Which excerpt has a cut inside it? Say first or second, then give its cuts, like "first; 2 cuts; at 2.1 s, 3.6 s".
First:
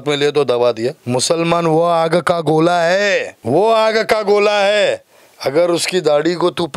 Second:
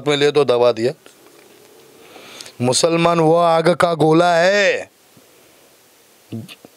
first; 2 cuts; at 1.0 s, 3.3 s